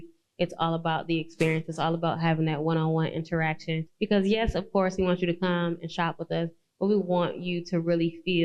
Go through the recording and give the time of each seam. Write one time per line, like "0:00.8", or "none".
0:03.9